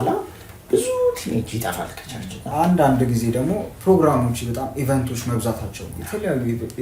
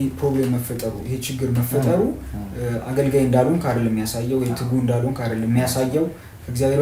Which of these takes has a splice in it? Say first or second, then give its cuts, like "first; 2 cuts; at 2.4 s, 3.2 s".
first; 1 cut; at 2.5 s